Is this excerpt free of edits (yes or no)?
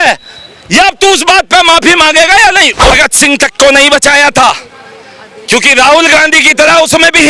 no